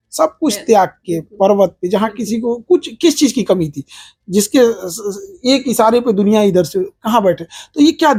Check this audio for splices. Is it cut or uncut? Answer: uncut